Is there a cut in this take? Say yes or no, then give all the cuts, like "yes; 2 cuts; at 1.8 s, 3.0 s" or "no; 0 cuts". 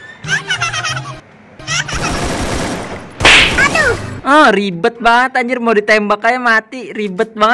no; 0 cuts